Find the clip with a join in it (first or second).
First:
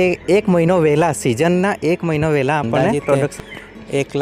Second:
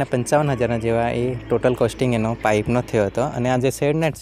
first